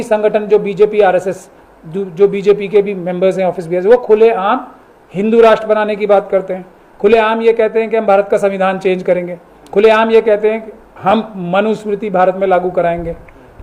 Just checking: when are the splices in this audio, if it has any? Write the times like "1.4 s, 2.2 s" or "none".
none